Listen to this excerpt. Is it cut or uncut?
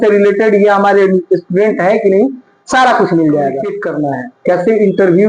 cut